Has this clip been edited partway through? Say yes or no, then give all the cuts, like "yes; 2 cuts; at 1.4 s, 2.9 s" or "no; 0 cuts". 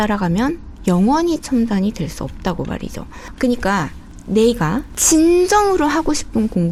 no; 0 cuts